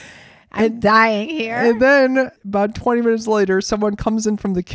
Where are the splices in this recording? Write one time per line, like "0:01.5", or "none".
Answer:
0:02.4